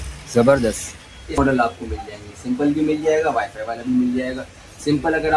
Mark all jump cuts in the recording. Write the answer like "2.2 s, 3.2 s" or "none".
1.4 s